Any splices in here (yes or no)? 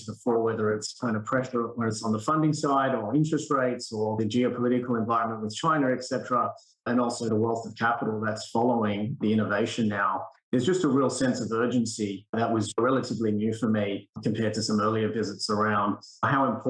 no